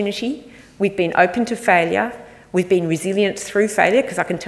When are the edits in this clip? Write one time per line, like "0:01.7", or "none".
none

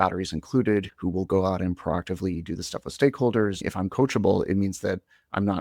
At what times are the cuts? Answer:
0:00.9
0:03.6

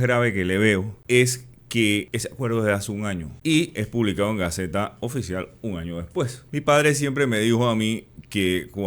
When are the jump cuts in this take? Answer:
0:00.9
0:02.2
0:03.3
0:06.4

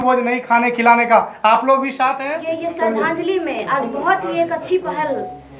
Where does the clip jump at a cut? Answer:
0:02.3

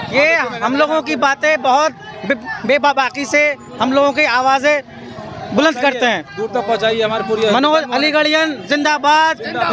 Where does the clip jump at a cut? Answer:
none

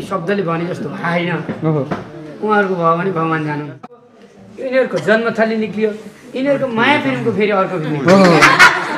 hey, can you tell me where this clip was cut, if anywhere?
0:04.0

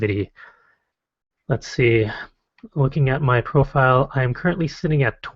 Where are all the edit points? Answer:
0:03.3

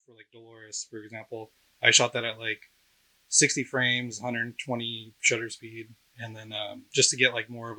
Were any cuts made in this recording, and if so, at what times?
none

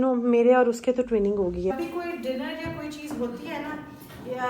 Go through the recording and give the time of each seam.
0:01.7

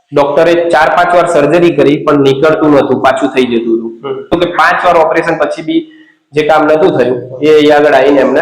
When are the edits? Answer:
0:04.4

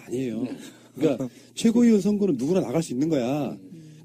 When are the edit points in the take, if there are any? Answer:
0:01.2

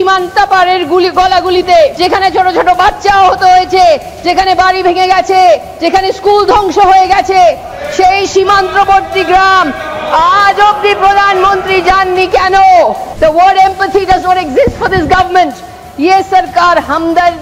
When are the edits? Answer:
0:01.9
0:13.1

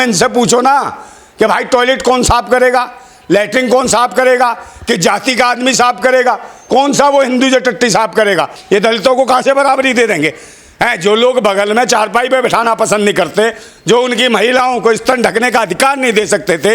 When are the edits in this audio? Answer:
0:08.6

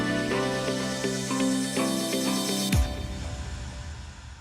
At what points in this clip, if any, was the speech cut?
0:01.6

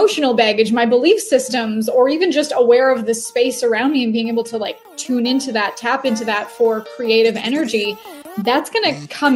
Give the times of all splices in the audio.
none

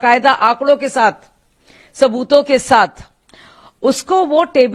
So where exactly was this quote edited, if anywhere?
none

